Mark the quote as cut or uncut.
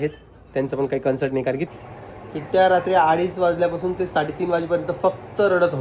cut